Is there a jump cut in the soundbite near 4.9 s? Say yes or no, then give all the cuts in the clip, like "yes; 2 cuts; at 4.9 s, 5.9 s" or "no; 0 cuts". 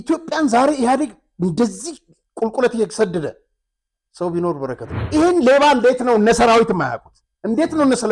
yes; 1 cut; at 4.9 s